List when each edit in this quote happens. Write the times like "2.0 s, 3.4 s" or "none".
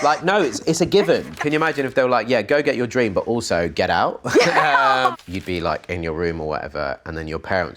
1.4 s, 5.1 s